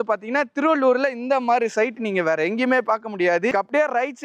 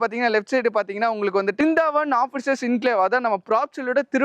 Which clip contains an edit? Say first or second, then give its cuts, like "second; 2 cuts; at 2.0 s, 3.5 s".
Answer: second; 1 cut; at 1.6 s